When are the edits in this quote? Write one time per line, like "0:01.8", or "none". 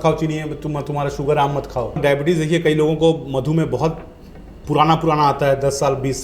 0:02.0

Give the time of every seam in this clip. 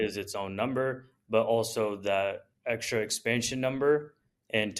0:02.5

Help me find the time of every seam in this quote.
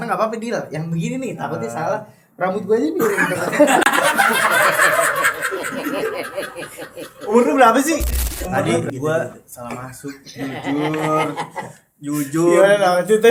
0:08.5

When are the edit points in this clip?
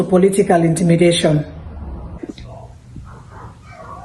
0:02.1

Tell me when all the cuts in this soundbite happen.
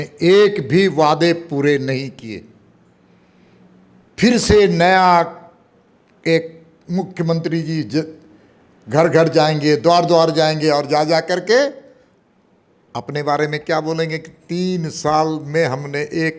none

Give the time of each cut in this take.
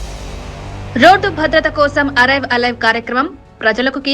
0:00.9

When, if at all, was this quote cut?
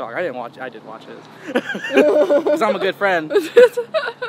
none

